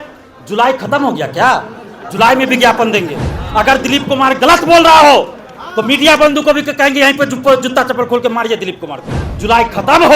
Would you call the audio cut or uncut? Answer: cut